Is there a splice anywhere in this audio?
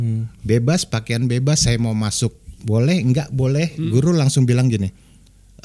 yes; 1 cut; at 3.8 s

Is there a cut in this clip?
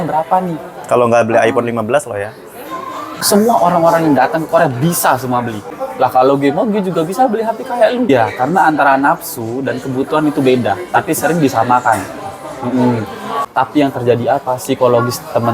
yes; 4 cuts; at 3.2 s, 5.8 s, 8.1 s, 13.3 s

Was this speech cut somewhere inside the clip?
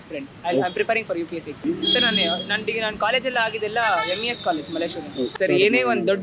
no; 0 cuts

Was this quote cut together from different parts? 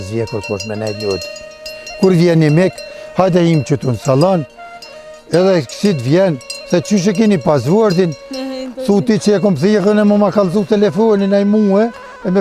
no; 0 cuts

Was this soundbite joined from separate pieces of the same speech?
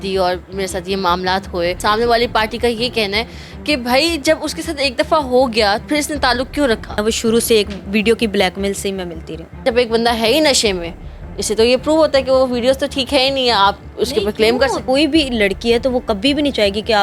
yes; 5 cuts; at 1.8 s, 5.8 s, 7.0 s, 9.6 s, 14.8 s

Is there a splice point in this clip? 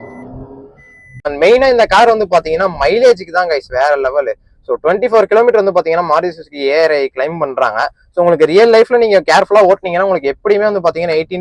yes; 1 cut; at 1.3 s

